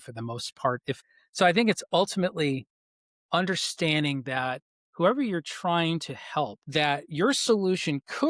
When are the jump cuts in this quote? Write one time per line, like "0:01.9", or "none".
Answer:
0:01.0
0:06.6